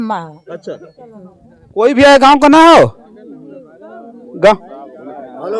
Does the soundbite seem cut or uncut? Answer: uncut